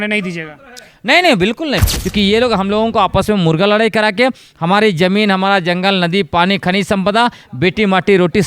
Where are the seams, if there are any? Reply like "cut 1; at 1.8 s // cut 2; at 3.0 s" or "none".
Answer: cut 1; at 1.8 s